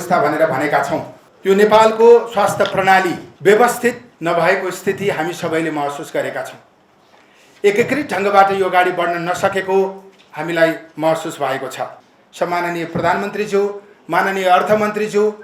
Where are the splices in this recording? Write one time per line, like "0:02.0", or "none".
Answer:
0:01.2
0:03.3
0:04.1
0:11.9